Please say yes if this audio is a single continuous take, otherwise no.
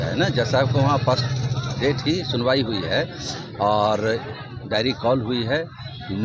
yes